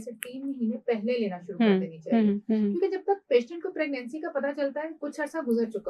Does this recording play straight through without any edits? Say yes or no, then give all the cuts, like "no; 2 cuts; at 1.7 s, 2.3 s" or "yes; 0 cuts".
no; 1 cut; at 5.0 s